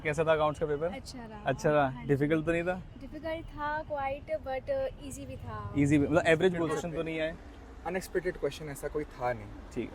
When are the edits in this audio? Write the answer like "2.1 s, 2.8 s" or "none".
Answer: 6.8 s